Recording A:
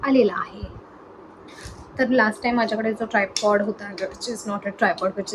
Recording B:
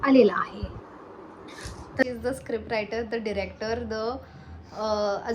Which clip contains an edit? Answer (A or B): B